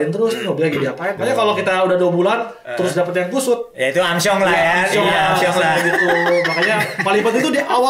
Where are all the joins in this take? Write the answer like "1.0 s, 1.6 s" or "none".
1.2 s, 3.7 s